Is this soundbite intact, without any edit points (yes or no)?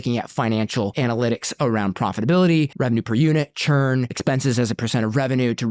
no